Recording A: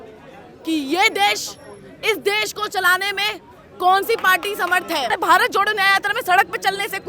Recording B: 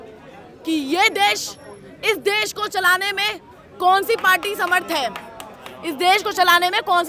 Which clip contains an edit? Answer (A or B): A